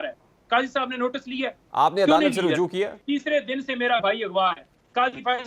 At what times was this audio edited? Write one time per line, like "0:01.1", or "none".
0:03.0